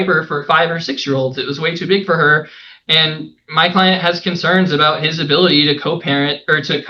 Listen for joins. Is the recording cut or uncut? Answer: uncut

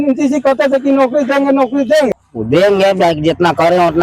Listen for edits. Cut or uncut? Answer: cut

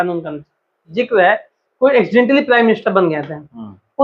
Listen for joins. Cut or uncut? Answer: cut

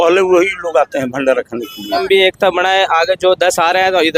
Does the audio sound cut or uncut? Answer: cut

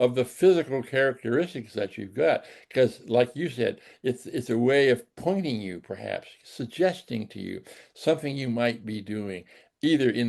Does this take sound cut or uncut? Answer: uncut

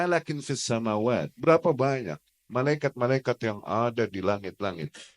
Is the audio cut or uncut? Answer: cut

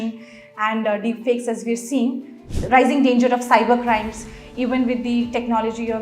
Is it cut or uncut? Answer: cut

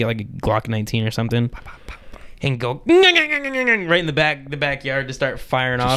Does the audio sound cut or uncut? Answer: uncut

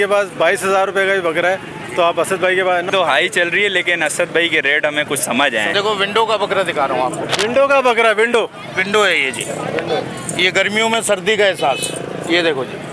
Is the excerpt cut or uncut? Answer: cut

